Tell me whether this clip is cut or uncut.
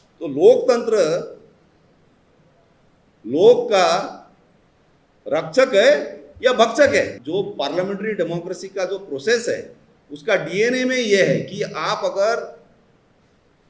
cut